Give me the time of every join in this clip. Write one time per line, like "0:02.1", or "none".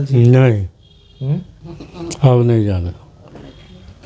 none